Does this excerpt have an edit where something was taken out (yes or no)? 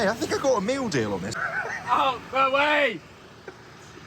yes